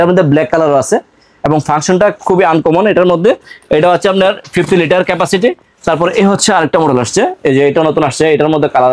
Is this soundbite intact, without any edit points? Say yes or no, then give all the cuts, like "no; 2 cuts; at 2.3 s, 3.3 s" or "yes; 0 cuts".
yes; 0 cuts